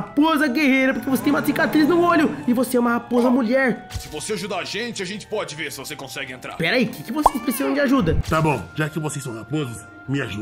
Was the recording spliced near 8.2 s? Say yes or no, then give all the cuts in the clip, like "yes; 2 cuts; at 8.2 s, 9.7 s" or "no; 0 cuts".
yes; 2 cuts; at 3.9 s, 8.2 s